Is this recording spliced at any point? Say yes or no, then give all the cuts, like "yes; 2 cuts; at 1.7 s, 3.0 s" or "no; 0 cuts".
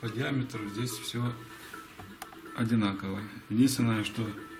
no; 0 cuts